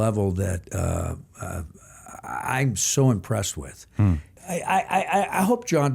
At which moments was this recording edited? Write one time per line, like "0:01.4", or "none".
0:04.3